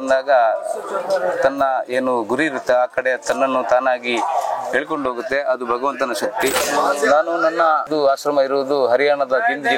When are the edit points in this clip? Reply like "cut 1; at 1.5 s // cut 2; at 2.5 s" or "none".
cut 1; at 6.6 s // cut 2; at 7.9 s